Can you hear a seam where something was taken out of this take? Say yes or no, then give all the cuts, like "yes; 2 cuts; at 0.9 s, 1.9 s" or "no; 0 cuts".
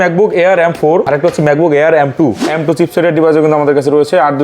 yes; 2 cuts; at 1.1 s, 2.4 s